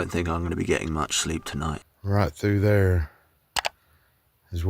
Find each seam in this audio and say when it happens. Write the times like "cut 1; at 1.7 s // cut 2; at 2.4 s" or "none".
cut 1; at 1.9 s